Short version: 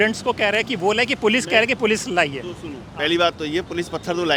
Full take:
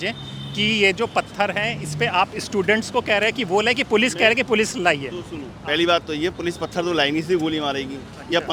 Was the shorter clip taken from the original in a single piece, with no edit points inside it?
yes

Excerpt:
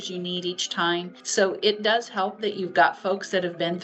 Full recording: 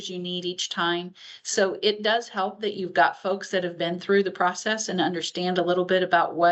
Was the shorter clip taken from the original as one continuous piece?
no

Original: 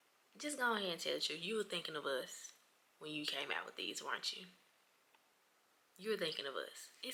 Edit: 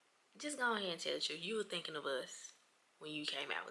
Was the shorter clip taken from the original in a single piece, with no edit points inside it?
yes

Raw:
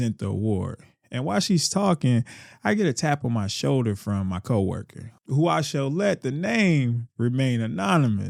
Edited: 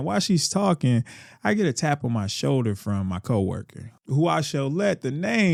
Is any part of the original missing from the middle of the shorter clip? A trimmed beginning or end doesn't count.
no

